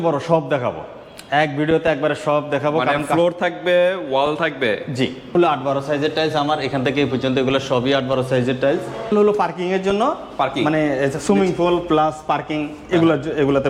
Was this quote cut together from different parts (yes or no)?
yes